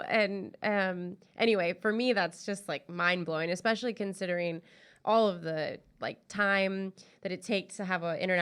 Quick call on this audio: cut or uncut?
uncut